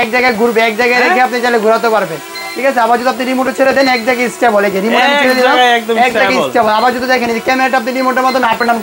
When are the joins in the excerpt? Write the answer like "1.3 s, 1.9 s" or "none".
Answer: none